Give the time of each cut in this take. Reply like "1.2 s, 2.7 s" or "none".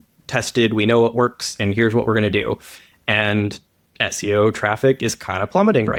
none